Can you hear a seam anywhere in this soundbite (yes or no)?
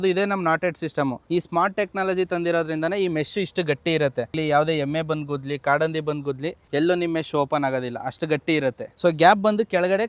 yes